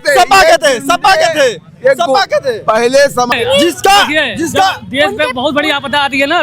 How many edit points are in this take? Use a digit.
1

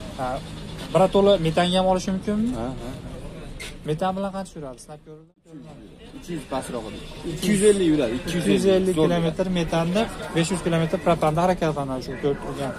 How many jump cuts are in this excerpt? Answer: 0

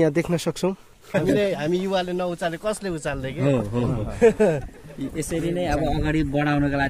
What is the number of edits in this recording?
1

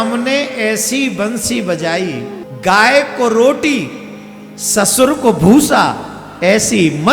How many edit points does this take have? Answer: 1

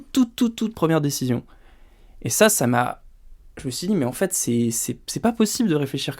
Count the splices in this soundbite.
0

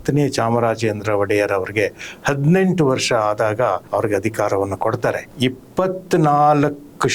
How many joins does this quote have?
2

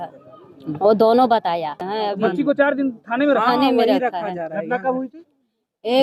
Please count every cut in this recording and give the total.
1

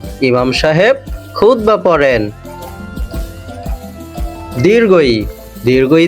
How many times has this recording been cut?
0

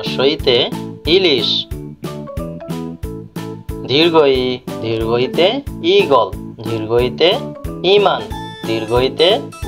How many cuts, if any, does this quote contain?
2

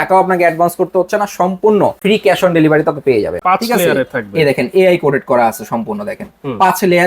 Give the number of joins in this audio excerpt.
2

